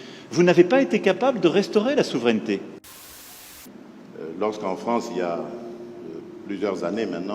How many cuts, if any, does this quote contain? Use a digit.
1